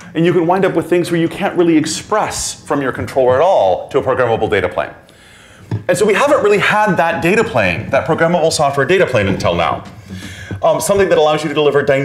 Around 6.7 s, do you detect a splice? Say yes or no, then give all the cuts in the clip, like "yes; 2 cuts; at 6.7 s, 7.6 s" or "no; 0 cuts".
no; 0 cuts